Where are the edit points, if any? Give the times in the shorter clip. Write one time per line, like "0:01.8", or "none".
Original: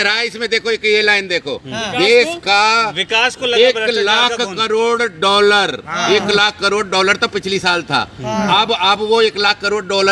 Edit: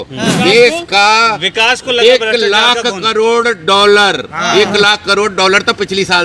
none